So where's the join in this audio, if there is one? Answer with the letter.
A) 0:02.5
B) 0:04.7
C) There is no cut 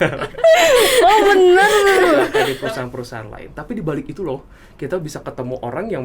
A